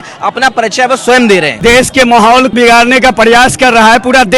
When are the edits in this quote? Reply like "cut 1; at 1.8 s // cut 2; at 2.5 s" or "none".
cut 1; at 1.6 s // cut 2; at 2.5 s